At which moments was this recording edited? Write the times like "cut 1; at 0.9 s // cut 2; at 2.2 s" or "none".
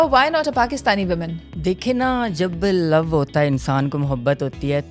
cut 1; at 1.4 s